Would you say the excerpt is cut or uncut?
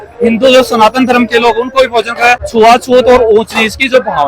cut